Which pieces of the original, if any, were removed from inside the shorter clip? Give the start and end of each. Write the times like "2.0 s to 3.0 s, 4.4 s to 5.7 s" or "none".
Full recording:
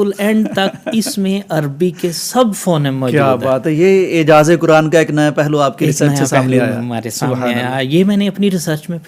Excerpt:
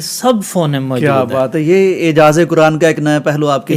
none